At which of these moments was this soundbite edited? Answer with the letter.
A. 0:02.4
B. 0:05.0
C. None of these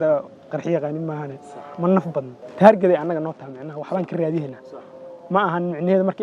A